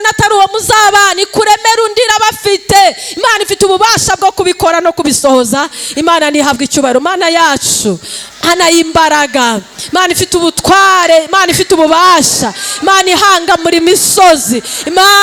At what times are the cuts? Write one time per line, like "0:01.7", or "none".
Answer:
none